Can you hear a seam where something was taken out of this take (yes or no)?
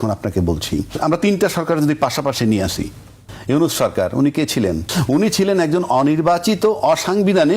yes